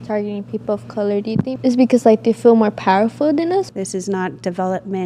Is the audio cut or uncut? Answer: cut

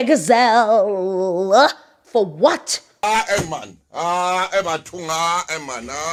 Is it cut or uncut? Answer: uncut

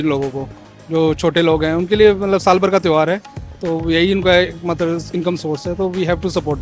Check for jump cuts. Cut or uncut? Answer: uncut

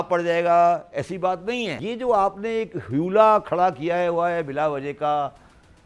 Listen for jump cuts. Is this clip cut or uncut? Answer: cut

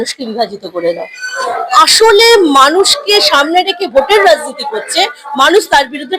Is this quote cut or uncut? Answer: cut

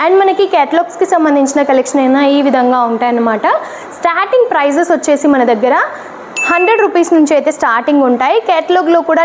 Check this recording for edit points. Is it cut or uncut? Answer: uncut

